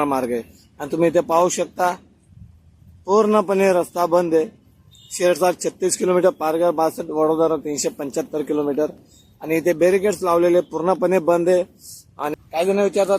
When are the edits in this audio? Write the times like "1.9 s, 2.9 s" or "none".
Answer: 12.2 s